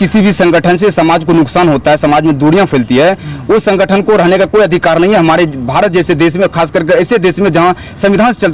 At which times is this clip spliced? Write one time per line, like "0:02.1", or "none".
none